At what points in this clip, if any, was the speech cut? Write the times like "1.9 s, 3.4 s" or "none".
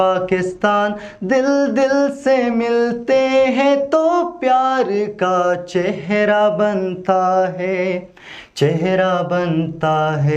none